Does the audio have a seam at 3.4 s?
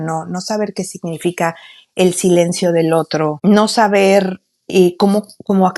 yes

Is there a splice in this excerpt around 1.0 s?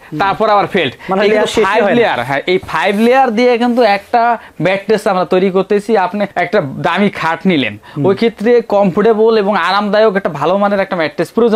no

